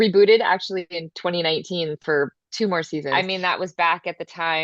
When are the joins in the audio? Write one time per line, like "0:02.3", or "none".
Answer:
0:03.1